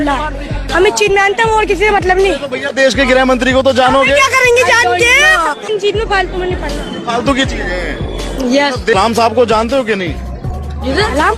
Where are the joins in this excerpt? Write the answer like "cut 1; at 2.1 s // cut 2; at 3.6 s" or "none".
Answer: none